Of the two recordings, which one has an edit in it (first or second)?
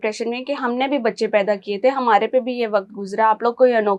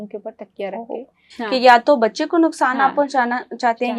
second